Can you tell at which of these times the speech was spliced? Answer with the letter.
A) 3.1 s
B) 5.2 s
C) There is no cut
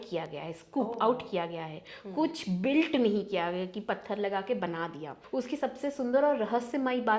B